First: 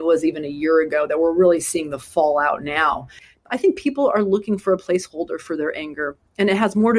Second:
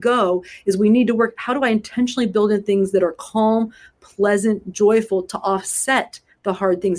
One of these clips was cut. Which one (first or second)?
first